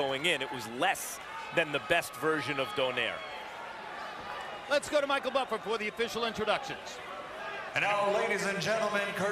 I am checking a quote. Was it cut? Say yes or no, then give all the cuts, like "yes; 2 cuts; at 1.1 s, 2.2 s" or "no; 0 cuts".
no; 0 cuts